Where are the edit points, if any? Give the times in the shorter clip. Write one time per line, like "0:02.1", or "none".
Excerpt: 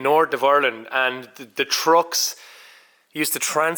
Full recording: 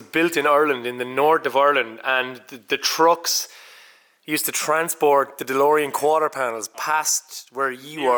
none

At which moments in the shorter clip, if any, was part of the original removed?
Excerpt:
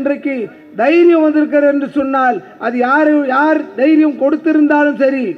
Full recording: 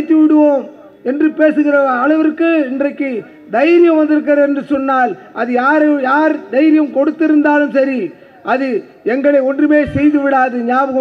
none

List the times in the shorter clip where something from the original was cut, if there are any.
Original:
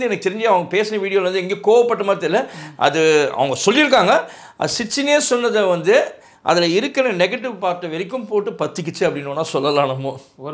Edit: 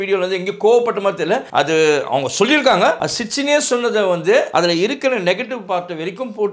0:01.5
0:03.1
0:04.5

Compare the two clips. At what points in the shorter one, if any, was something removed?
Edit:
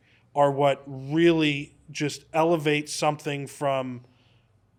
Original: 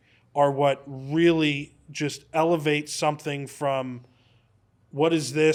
none

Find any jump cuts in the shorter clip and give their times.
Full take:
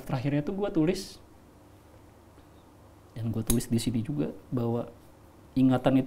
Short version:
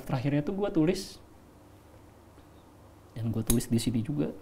none

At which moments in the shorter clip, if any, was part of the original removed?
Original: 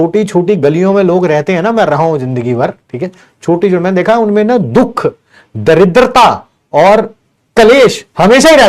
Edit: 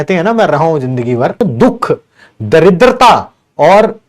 0:01.4

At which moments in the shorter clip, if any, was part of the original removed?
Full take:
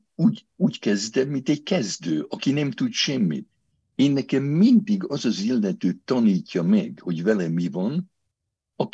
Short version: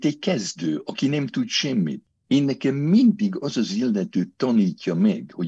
0:02.1

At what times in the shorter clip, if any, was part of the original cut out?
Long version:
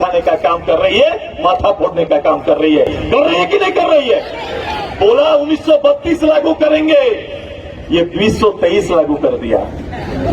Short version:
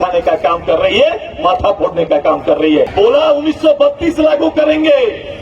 0:02.9

